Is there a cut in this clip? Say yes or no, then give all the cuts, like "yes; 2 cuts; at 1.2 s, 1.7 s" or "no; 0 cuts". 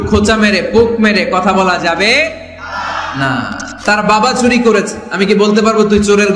yes; 1 cut; at 3.6 s